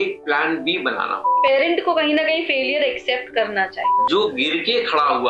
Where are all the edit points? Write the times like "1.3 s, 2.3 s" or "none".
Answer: 1.3 s, 4.0 s